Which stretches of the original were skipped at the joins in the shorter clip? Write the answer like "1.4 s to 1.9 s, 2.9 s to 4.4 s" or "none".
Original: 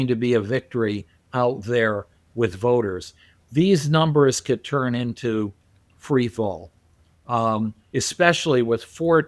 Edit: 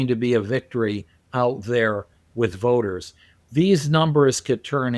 none